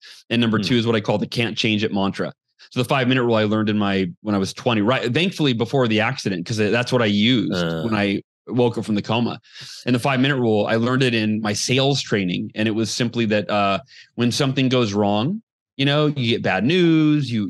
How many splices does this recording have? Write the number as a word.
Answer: zero